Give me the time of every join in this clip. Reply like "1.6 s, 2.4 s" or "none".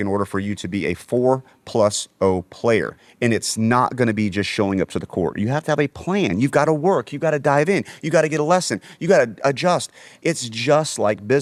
none